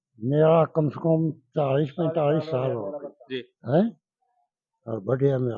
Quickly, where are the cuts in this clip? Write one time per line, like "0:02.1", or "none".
none